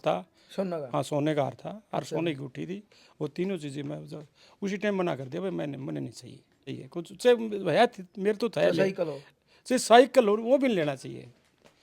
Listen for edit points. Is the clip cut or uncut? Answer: cut